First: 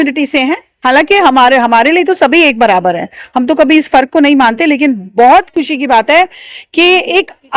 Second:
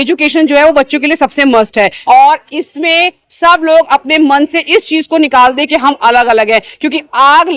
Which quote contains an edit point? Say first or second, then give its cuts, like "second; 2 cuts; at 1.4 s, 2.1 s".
second; 1 cut; at 2.0 s